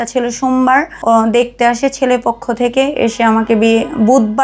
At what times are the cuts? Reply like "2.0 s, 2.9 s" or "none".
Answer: 0.9 s